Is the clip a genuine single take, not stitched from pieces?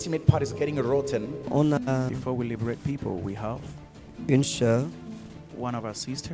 no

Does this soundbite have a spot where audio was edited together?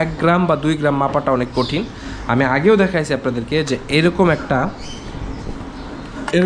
no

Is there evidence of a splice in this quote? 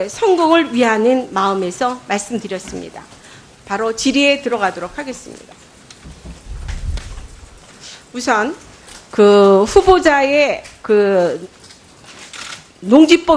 no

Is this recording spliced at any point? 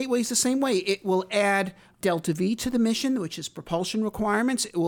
yes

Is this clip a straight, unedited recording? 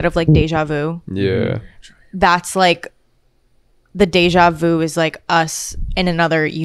yes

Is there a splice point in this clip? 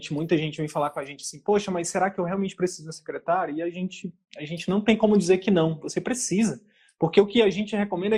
no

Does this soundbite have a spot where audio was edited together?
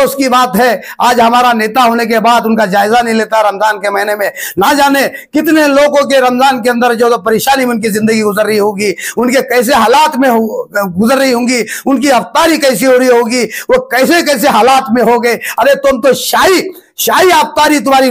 no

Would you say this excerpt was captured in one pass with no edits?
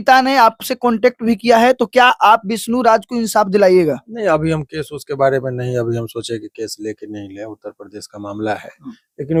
yes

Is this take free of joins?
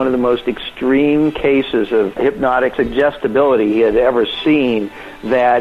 no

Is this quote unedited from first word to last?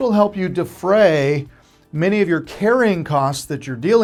yes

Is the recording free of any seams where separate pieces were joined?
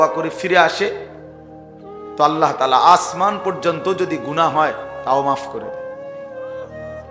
yes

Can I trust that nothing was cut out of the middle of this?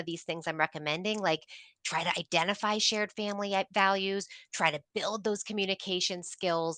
yes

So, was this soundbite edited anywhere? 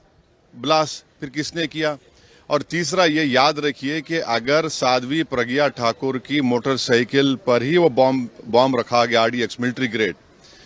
no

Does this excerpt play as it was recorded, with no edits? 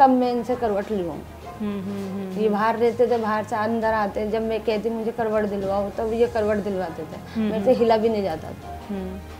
yes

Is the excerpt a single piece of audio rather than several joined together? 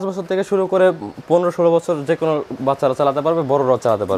yes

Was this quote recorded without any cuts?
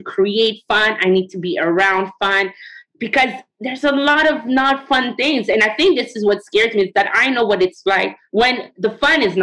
no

